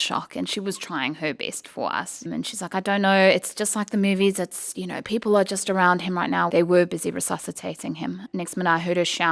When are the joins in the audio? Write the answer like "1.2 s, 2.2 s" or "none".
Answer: 2.3 s, 6.5 s, 8.3 s